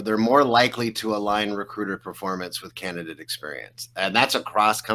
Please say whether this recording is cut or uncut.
uncut